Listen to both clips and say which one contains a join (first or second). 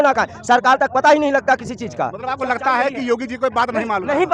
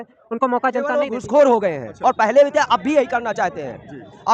second